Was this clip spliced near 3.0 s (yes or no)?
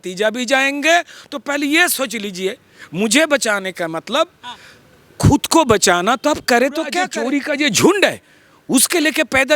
no